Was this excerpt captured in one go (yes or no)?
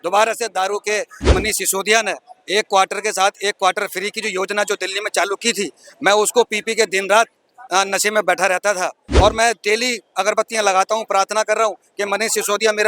no